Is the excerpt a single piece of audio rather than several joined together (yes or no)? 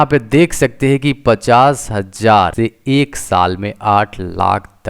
no